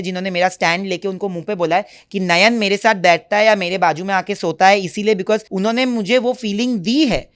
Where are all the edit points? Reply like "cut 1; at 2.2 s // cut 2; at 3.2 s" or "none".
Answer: cut 1; at 5.5 s